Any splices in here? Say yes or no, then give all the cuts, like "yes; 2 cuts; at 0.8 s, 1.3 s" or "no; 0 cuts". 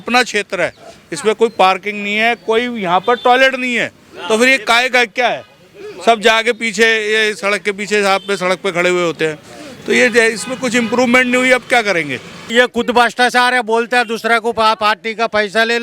yes; 1 cut; at 12.4 s